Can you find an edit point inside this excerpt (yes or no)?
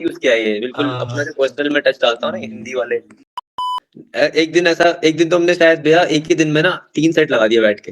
yes